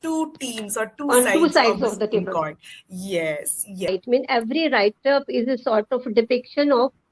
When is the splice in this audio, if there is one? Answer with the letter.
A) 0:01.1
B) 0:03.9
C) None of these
B